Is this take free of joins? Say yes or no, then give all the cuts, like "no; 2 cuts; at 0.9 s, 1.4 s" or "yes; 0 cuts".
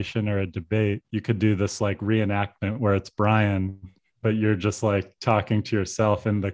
no; 1 cut; at 1.0 s